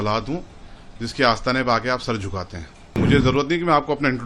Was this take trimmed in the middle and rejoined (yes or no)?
yes